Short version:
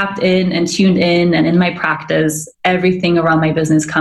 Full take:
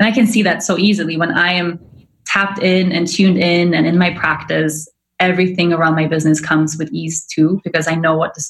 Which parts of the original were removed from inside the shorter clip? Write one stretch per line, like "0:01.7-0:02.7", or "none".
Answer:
0:04.9-0:05.0